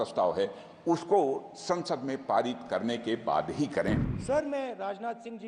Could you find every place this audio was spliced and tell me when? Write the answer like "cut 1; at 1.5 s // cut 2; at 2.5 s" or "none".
cut 1; at 4.1 s